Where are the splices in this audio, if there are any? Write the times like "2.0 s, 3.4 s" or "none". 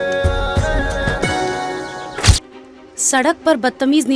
2.4 s

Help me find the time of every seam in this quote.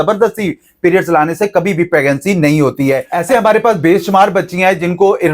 none

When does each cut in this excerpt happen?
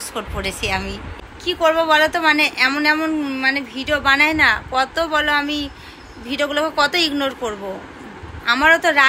1.1 s

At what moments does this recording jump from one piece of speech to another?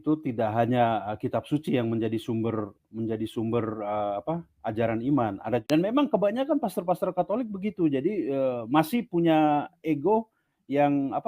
5.6 s

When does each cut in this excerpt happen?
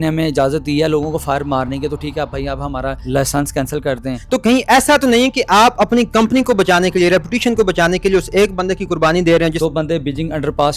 3.0 s, 4.2 s, 9.5 s

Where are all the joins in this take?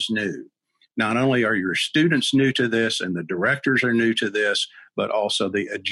none

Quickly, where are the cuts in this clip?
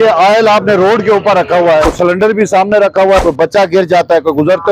1.9 s, 3.2 s

